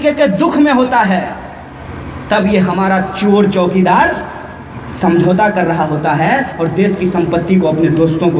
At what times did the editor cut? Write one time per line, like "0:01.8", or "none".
none